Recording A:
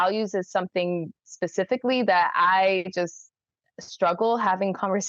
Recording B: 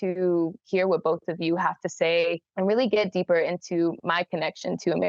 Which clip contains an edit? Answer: B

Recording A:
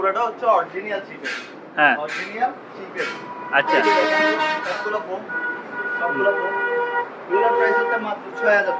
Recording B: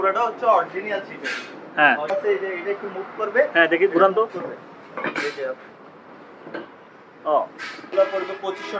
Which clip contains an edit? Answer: B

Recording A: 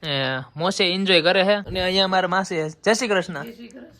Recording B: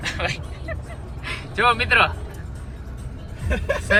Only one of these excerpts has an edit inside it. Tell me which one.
A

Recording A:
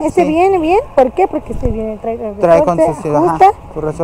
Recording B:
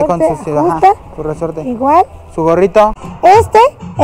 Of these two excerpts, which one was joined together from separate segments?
B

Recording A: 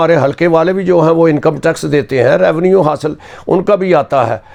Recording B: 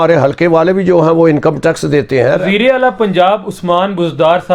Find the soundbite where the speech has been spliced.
B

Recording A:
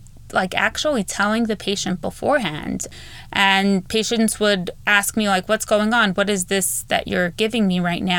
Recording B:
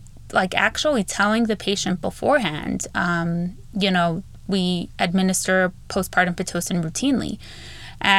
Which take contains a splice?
A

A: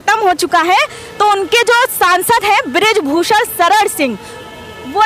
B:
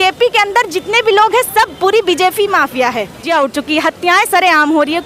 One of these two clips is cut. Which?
B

